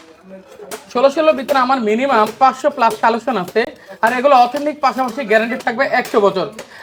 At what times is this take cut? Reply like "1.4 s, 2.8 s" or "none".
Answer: none